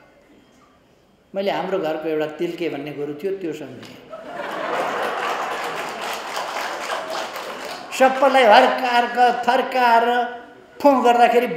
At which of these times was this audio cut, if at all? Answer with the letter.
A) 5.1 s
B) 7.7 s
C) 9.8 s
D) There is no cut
B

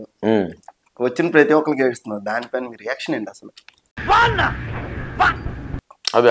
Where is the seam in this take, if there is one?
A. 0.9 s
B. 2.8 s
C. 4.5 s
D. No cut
D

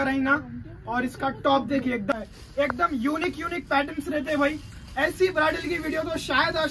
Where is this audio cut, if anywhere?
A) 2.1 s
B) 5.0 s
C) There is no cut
A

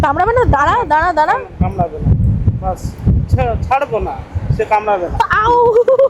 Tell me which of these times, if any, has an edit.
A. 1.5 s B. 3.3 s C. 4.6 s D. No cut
D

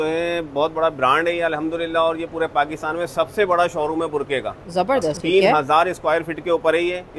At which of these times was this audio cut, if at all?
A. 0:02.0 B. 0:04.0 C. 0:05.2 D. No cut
C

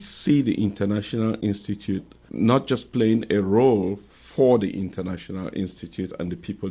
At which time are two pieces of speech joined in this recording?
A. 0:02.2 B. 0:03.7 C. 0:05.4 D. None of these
A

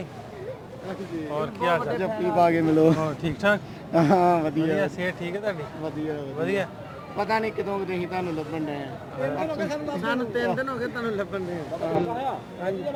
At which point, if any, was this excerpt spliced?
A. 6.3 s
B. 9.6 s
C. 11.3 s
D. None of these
D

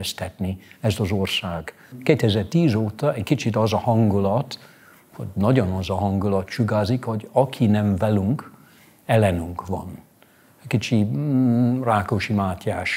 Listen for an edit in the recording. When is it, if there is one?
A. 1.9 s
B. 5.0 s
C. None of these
A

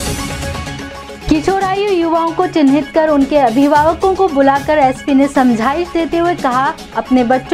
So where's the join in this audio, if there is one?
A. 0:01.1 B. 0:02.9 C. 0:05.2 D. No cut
A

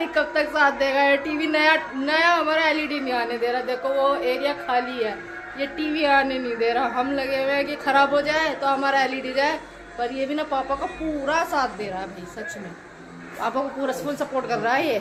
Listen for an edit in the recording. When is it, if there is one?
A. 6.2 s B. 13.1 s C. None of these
C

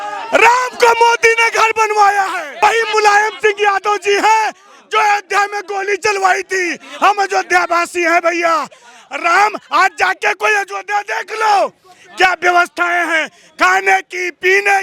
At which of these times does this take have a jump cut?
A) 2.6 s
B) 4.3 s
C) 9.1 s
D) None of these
A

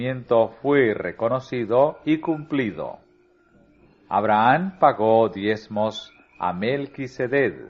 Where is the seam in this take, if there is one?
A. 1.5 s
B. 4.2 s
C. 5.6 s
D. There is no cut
B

